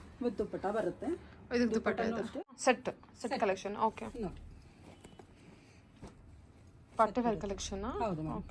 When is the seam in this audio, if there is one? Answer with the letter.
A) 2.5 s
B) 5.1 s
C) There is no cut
A